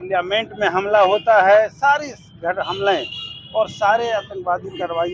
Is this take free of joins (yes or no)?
yes